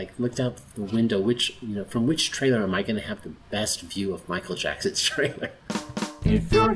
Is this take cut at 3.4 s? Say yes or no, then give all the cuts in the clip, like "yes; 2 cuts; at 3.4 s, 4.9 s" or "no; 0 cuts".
no; 1 cut; at 5.6 s